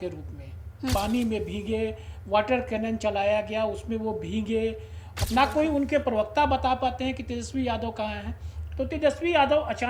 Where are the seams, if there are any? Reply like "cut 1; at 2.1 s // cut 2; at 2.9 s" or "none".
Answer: cut 1; at 0.9 s // cut 2; at 5.0 s